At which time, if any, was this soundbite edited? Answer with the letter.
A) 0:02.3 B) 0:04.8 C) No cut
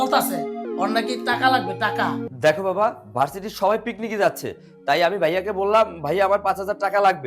A